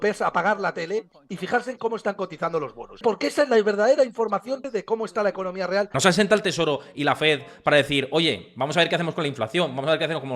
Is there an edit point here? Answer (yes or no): yes